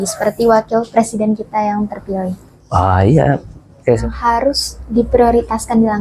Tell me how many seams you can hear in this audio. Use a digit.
1